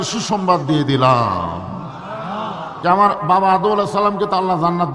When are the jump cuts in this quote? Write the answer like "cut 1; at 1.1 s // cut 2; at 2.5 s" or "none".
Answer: cut 1; at 2.7 s